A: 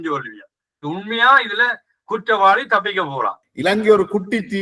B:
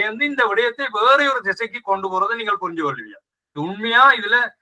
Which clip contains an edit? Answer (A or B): A